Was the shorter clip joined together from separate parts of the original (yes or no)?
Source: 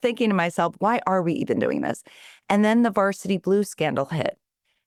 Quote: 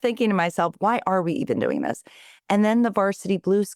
no